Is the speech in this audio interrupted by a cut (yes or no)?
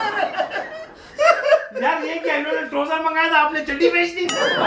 no